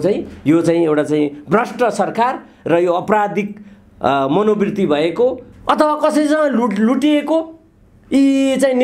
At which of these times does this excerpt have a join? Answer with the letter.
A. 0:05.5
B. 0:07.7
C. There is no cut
A